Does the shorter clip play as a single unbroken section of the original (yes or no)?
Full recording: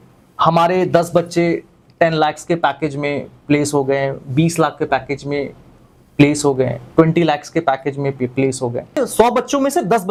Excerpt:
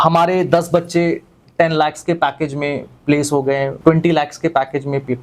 no